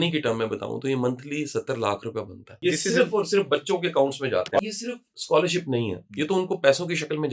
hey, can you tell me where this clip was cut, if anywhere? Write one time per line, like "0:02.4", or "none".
0:02.6
0:04.6